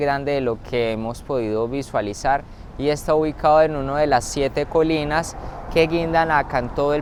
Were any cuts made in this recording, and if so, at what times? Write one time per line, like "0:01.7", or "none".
none